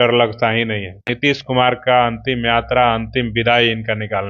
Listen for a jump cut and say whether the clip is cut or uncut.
cut